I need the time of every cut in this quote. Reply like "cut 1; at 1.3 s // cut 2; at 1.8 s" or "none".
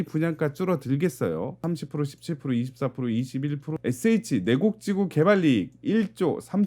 cut 1; at 1.6 s // cut 2; at 3.7 s